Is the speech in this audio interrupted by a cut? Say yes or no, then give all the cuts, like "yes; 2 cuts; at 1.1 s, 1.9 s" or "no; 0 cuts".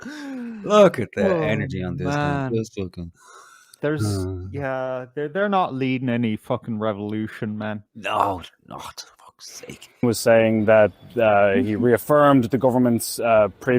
yes; 1 cut; at 10.0 s